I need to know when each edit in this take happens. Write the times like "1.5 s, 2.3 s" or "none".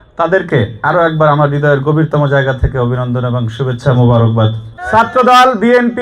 4.7 s